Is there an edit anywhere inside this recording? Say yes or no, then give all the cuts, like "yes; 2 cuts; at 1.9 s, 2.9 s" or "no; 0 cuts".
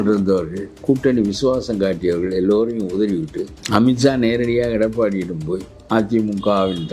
no; 0 cuts